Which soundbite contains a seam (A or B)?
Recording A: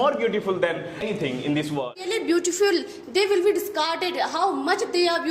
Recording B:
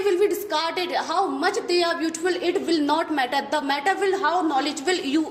A